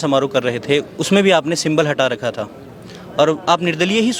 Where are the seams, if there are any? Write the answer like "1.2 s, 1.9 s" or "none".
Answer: none